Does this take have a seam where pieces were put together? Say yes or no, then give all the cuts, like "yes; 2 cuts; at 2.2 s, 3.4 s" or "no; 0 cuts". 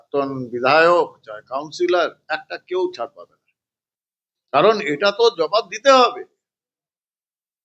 no; 0 cuts